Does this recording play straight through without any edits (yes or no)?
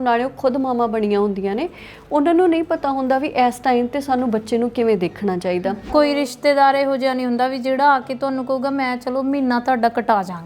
no